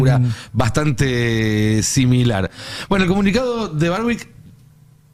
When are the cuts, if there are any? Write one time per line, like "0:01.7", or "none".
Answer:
none